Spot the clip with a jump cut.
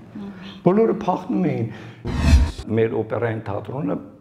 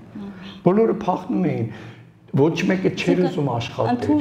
first; 1 cut; at 2.3 s

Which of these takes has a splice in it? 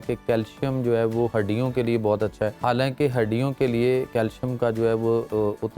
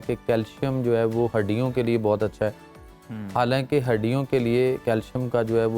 first; 1 cut; at 2.6 s

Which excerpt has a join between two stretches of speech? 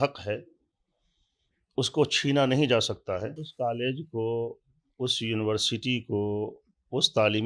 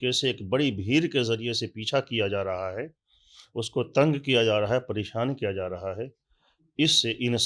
first; 1 cut; at 3.4 s

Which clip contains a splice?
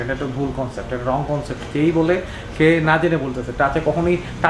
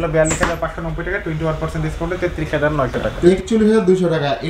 second; 1 cut; at 3.1 s

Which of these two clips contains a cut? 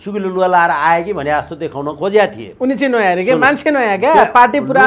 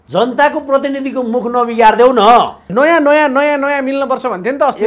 second; 1 cut; at 2.7 s

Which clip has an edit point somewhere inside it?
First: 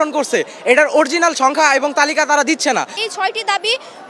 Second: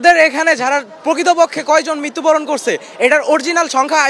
first; 1 cut; at 2.9 s

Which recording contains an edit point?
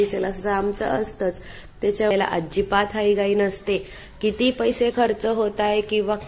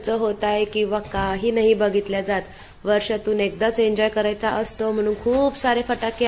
first; 1 cut; at 2.1 s

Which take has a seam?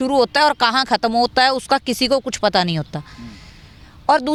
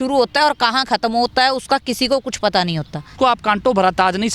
second; 1 cut; at 3.1 s

